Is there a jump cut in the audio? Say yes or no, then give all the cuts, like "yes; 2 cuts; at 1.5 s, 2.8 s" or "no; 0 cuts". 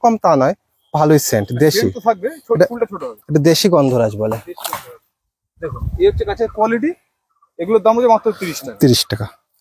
no; 0 cuts